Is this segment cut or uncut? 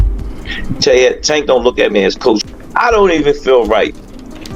cut